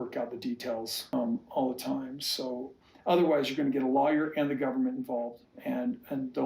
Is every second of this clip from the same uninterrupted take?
no; 2 cuts; at 1.0 s, 5.5 s

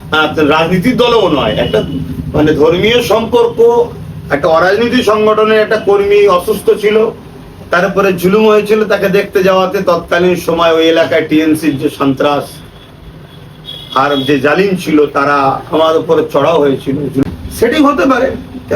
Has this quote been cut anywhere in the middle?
yes; 1 cut; at 17.2 s

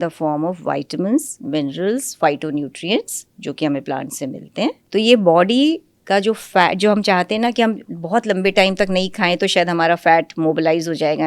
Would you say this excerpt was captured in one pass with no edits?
no; 1 cut; at 4.8 s

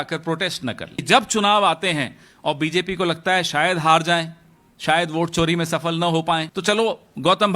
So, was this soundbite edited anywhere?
yes; 2 cuts; at 1.0 s, 6.5 s

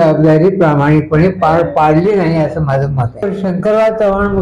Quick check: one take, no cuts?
no; 1 cut; at 3.2 s

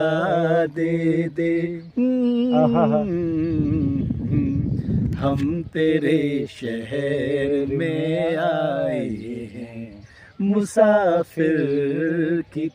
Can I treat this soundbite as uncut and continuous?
yes; 0 cuts

